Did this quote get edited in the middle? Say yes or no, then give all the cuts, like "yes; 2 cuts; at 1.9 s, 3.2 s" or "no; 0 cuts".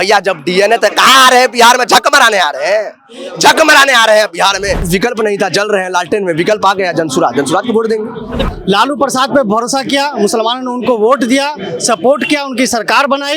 yes; 2 cuts; at 4.9 s, 8.5 s